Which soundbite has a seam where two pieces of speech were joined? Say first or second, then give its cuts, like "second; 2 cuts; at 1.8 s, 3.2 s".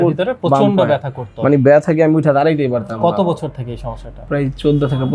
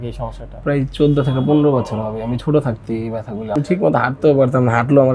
second; 1 cut; at 3.5 s